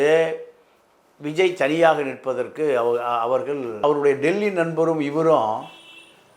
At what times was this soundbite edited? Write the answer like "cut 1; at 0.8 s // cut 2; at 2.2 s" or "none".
cut 1; at 3.8 s